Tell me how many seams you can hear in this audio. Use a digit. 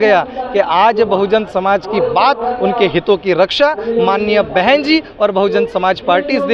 0